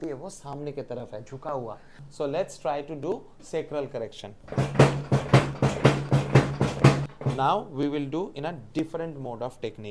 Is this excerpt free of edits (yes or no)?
yes